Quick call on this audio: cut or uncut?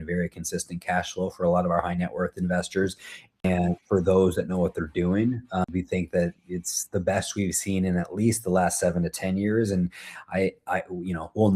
cut